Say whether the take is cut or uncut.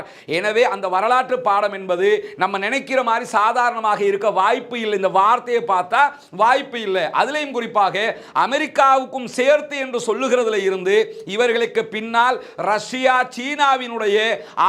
uncut